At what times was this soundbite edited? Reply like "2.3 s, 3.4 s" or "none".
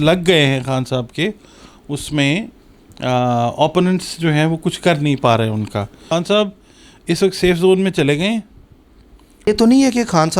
6.0 s, 9.5 s